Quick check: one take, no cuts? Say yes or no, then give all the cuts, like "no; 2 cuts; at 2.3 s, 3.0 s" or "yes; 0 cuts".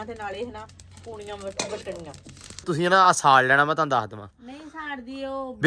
no; 1 cut; at 2.7 s